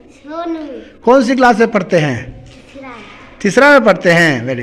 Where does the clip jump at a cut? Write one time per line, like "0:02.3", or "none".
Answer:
none